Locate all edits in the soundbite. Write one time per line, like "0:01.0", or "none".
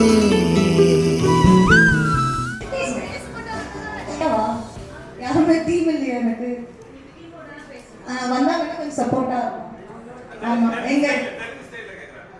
0:04.2